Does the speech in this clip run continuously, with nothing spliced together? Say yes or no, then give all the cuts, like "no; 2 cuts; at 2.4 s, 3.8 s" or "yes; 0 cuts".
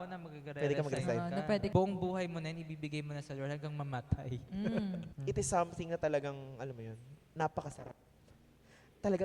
no; 2 cuts; at 1.7 s, 5.1 s